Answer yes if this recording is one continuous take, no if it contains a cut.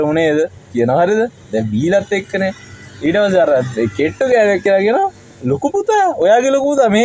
yes